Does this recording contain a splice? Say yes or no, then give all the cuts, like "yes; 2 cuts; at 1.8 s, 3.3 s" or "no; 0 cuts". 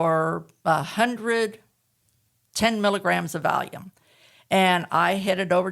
no; 0 cuts